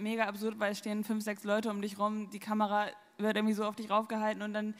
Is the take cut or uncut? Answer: uncut